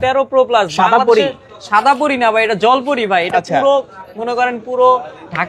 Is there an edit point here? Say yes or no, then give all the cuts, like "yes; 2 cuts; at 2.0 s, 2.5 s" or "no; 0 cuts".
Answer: no; 0 cuts